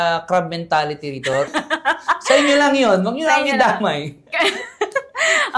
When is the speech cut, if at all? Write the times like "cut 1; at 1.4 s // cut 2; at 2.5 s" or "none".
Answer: cut 1; at 1.5 s